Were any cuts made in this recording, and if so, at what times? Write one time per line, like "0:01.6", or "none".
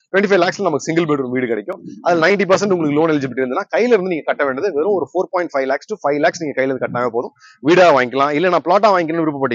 none